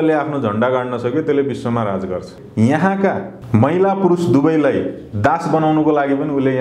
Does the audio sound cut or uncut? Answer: cut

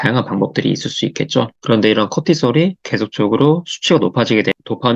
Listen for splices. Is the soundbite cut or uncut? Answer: cut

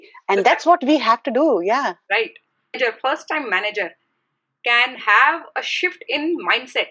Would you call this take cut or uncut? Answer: cut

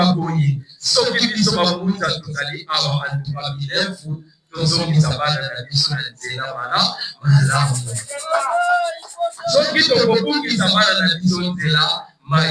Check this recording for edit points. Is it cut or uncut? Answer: uncut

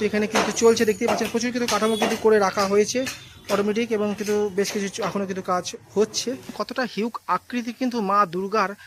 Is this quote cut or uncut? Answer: cut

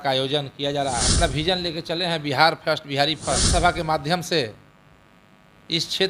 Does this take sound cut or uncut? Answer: cut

